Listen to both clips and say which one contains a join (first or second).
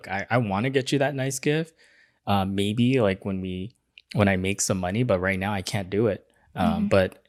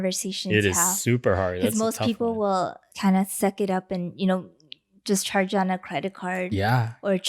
second